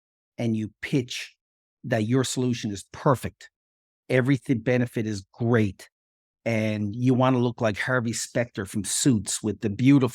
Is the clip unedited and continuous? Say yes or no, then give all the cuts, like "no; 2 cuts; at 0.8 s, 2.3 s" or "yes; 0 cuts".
yes; 0 cuts